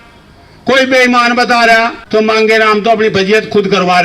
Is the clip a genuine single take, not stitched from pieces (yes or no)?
no